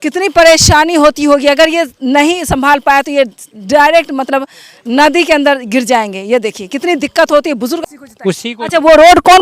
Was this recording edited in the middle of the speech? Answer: yes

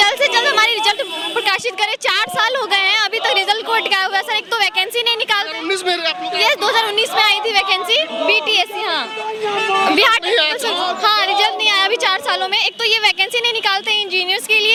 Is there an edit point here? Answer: no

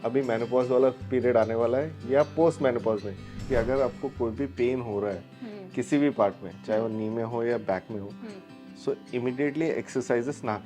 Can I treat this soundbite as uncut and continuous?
no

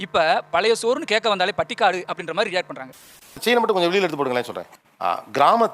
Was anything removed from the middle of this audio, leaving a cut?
yes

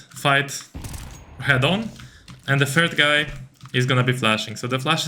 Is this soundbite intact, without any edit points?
yes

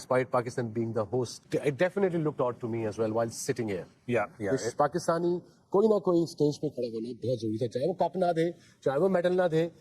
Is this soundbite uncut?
no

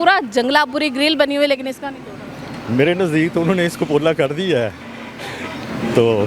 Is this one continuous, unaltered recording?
yes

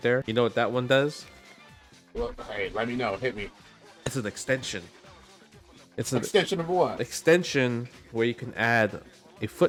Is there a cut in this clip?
no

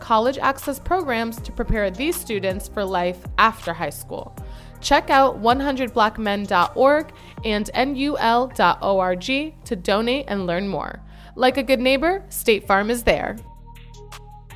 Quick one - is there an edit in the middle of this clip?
no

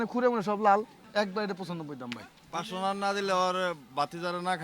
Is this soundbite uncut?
no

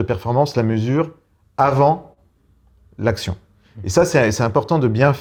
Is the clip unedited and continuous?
yes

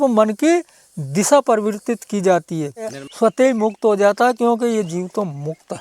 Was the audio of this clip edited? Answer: yes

